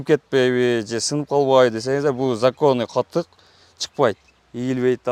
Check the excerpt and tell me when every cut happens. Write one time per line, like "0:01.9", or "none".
none

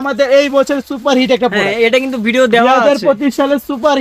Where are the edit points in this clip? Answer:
none

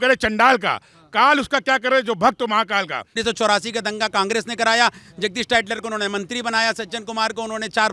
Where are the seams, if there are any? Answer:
0:03.1

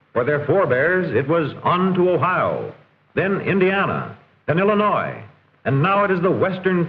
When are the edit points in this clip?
none

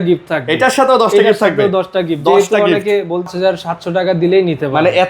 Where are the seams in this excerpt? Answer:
0:03.3

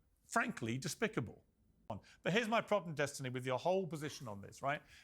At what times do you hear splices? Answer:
0:02.1

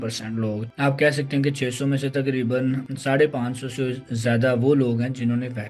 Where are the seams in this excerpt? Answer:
none

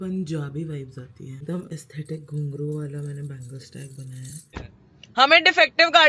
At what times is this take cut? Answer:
0:01.2
0:04.5

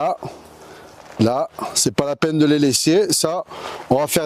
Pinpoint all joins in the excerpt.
none

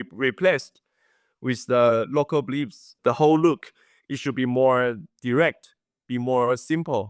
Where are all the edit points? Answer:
0:02.9

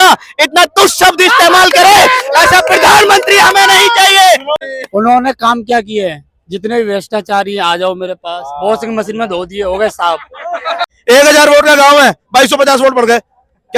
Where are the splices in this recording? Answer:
0:04.7
0:10.9

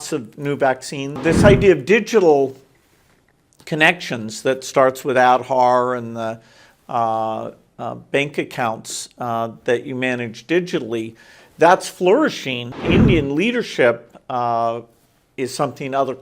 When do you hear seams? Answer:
0:01.2
0:12.8

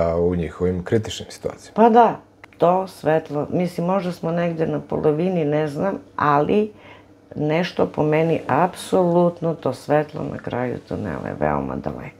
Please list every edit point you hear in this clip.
0:02.3

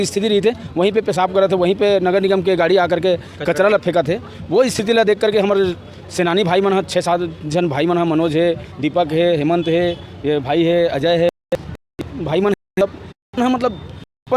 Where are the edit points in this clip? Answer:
none

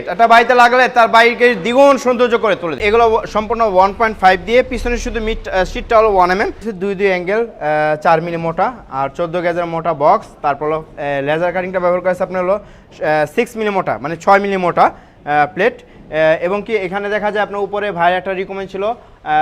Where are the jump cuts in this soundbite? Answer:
0:02.8
0:06.7

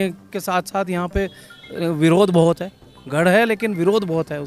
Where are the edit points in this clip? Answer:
none

